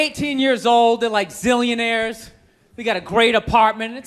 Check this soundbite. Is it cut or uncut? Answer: uncut